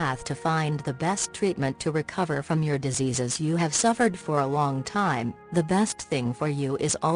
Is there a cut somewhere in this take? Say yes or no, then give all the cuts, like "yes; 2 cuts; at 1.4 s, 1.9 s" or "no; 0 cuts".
yes; 1 cut; at 1.6 s